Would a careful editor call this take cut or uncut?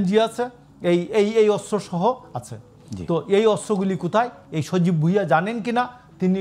uncut